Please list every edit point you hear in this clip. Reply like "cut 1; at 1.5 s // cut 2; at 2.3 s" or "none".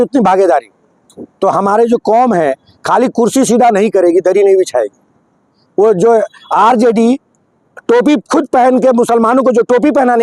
none

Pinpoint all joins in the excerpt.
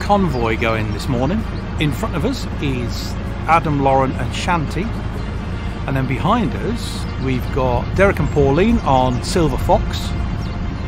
cut 1; at 1.7 s // cut 2; at 5.5 s // cut 3; at 7.0 s

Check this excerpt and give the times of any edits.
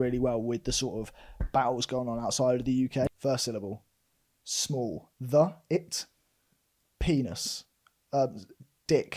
cut 1; at 3.1 s

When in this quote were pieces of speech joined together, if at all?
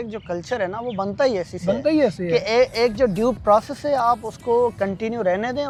none

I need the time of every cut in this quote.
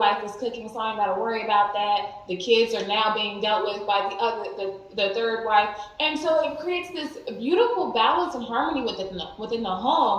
none

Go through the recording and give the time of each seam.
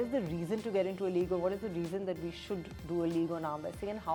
none

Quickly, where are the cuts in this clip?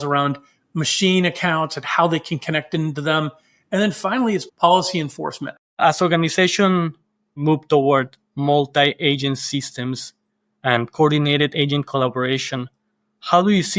cut 1; at 5.8 s // cut 2; at 7.4 s

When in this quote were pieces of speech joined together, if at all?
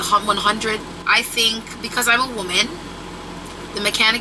cut 1; at 0.9 s

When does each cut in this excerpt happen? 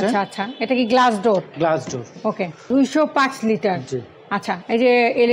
cut 1; at 2.6 s

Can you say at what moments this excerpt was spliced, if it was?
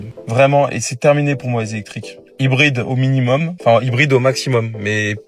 none

